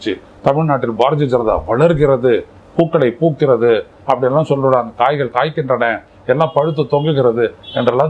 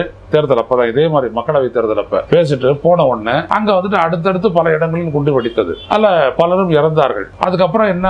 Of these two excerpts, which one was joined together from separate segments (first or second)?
second